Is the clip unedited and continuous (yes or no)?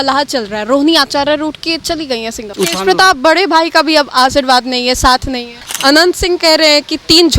no